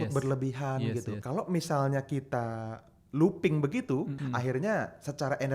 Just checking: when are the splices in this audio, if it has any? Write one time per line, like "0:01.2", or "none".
0:01.1
0:04.1